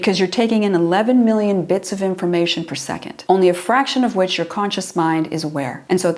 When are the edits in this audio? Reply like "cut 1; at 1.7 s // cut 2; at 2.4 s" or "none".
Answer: none

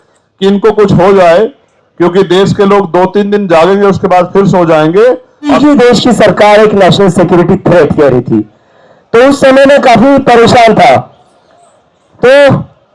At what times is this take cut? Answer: cut 1; at 5.5 s

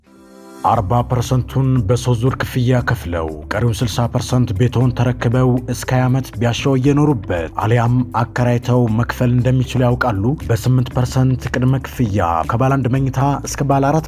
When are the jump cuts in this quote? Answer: none

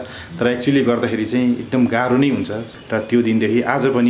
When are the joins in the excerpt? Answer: cut 1; at 2.7 s

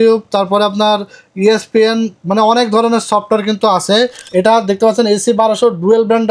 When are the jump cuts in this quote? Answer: cut 1; at 4.2 s

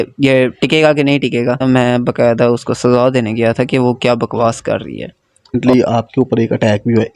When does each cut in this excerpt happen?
cut 1; at 1.6 s // cut 2; at 5.5 s

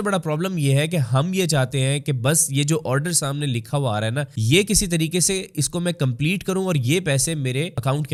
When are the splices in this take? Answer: none

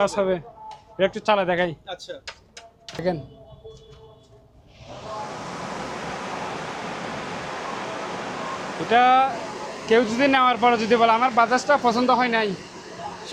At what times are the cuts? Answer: none

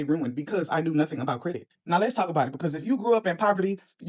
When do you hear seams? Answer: none

